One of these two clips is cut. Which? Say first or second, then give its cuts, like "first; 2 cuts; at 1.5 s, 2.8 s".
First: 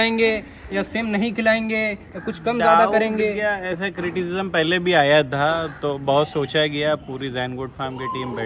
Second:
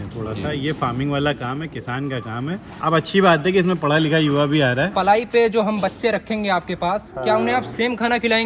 second; 2 cuts; at 2.7 s, 4.9 s